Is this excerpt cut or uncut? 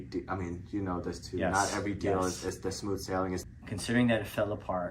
cut